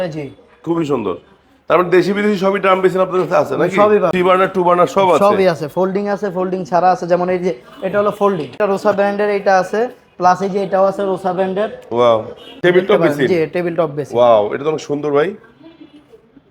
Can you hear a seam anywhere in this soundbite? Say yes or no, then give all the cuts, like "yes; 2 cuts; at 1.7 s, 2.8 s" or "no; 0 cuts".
yes; 3 cuts; at 4.1 s, 8.6 s, 12.4 s